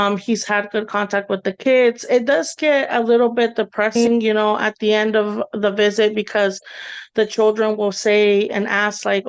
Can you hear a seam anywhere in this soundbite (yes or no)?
yes